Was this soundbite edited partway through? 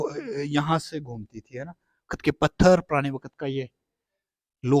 yes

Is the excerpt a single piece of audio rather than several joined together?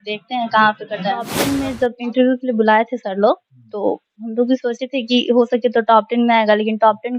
no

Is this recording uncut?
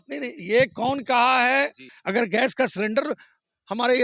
no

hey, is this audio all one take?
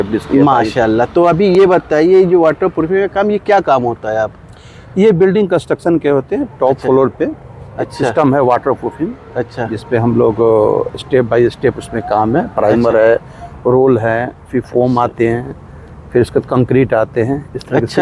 yes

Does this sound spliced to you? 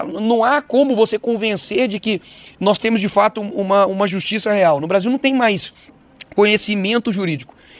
no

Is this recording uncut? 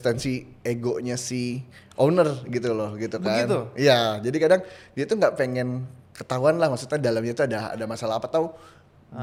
yes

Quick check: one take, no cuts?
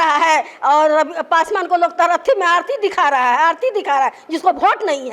yes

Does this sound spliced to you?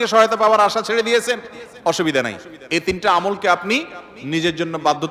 no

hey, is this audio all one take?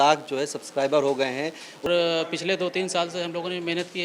no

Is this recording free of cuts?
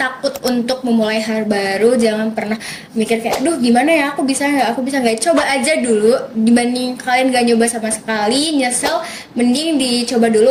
yes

